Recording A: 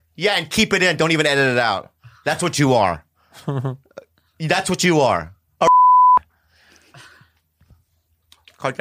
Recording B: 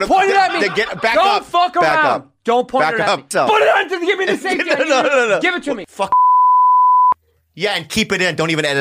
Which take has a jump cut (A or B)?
B